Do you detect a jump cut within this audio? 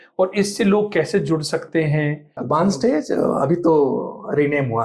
yes; 1 cut; at 2.3 s

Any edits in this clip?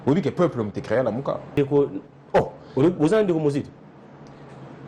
yes; 1 cut; at 1.5 s

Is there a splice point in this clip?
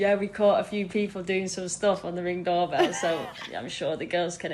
no; 0 cuts

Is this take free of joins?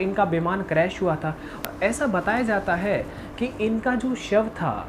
no; 1 cut; at 1.6 s

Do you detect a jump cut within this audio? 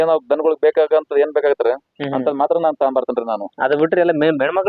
no; 0 cuts

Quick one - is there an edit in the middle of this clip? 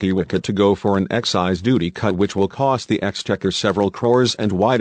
no; 0 cuts

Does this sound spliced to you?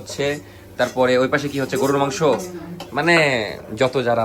no; 0 cuts

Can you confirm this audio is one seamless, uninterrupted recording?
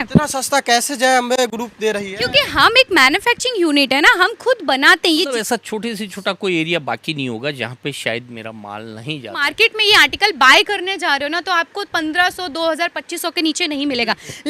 no; 2 cuts; at 5.3 s, 9.4 s

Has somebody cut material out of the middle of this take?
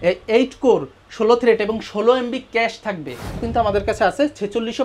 yes; 1 cut; at 3.4 s

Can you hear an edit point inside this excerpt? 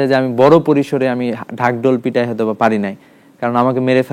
no; 0 cuts

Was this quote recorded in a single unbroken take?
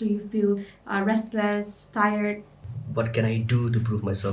no; 1 cut; at 2.5 s

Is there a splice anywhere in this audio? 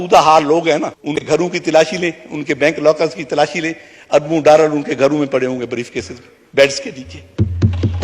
yes; 1 cut; at 1.2 s

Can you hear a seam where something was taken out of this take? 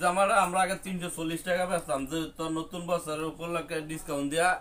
no; 0 cuts

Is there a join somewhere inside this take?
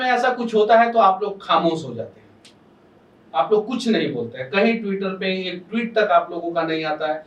no; 0 cuts

